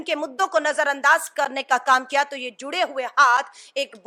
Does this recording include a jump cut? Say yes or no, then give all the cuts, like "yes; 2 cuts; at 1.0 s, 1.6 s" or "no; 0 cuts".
no; 0 cuts